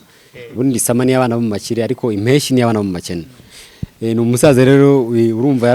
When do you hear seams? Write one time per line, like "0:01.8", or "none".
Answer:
none

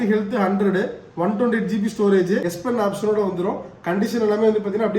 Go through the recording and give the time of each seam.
0:02.5

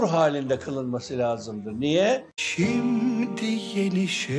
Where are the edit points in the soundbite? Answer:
0:02.4

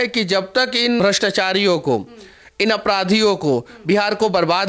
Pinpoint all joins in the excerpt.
0:01.0

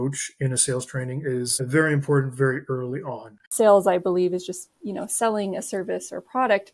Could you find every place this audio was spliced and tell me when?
0:01.5
0:03.4

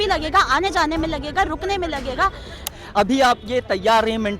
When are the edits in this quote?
0:02.6

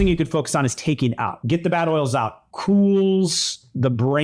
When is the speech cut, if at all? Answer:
0:01.4

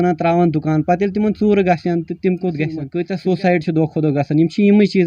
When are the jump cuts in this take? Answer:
0:02.9

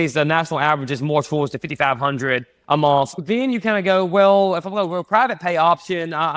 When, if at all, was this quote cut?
0:03.2

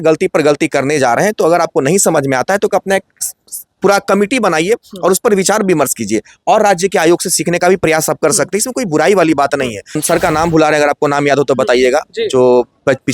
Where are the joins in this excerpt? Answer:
0:10.0

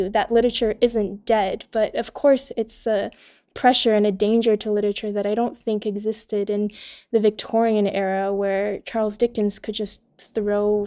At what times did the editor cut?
none

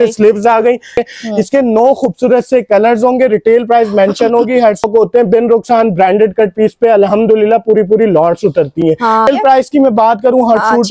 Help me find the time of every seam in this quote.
0:01.0
0:04.8
0:09.3

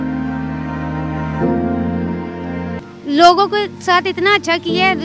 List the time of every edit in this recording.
0:02.8

